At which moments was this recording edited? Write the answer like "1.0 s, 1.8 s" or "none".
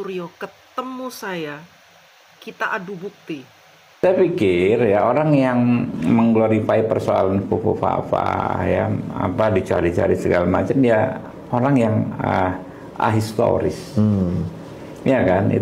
4.0 s